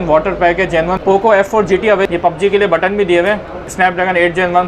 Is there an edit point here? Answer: yes; 3 cuts; at 1.0 s, 2.1 s, 3.7 s

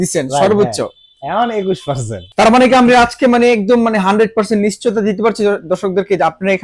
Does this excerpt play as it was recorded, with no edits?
no; 1 cut; at 2.2 s

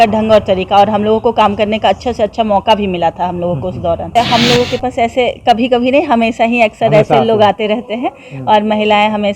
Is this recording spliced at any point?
yes; 1 cut; at 4.1 s

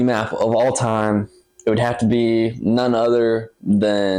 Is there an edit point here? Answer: no; 0 cuts

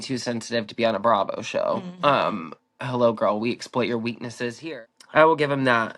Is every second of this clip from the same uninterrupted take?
no; 1 cut; at 4.5 s

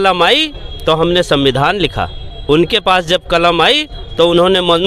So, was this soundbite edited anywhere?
no; 0 cuts

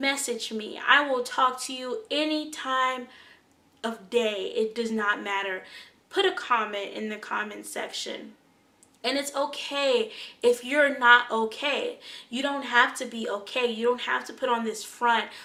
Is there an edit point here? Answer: no; 0 cuts

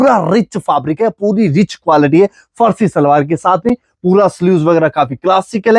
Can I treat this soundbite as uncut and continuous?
yes; 0 cuts

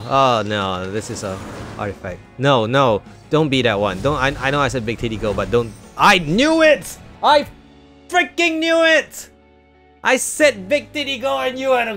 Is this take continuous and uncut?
yes; 0 cuts

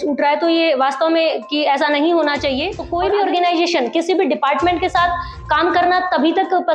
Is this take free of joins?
no; 1 cut; at 2.8 s

